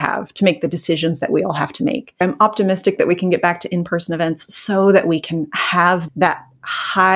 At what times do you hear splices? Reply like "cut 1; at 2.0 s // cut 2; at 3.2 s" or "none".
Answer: cut 1; at 2.2 s // cut 2; at 6.0 s